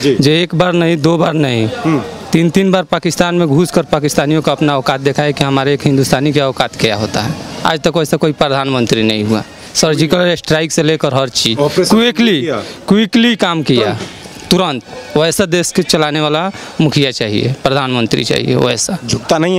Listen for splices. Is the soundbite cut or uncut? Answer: uncut